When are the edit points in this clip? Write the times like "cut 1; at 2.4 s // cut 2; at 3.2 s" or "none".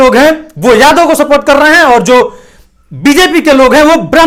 none